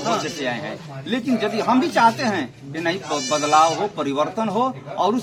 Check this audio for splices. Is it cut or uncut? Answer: uncut